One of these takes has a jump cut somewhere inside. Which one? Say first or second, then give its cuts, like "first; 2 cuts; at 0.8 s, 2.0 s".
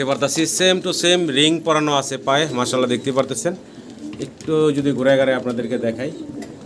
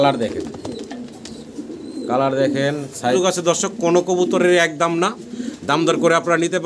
second; 1 cut; at 3.1 s